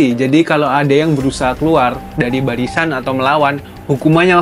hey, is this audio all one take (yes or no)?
yes